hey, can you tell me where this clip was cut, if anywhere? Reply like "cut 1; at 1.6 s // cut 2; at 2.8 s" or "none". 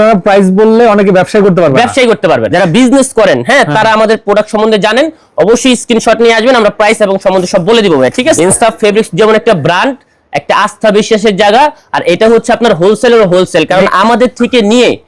cut 1; at 2.5 s // cut 2; at 8.4 s